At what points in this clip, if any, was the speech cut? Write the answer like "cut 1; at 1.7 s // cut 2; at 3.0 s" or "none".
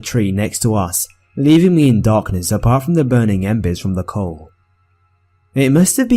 none